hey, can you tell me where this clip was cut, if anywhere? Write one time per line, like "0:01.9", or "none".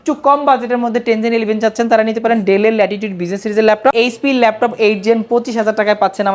0:03.9